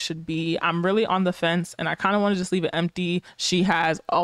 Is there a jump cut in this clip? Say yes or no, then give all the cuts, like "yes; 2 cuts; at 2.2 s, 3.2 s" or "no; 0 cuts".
yes; 1 cut; at 3.3 s